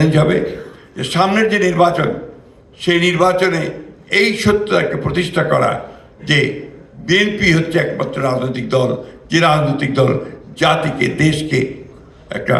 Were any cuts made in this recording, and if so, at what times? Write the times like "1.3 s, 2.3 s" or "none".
none